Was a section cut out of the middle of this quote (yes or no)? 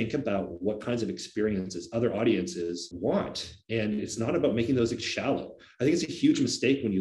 no